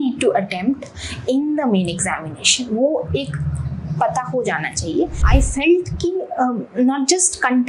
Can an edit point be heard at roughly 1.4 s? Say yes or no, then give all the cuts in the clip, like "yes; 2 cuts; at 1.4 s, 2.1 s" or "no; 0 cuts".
no; 1 cut; at 5.2 s